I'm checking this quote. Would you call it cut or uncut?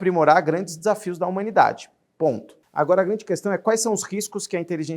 cut